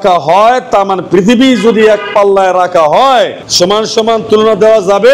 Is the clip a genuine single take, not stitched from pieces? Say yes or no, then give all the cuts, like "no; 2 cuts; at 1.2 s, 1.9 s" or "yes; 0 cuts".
yes; 0 cuts